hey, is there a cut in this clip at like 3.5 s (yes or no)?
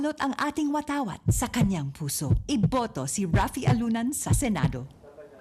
yes